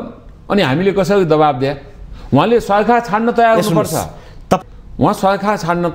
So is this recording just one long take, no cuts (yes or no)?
no